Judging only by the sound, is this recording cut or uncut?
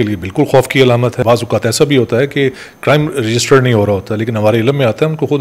cut